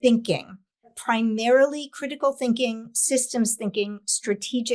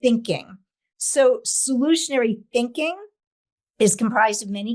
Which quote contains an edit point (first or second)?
first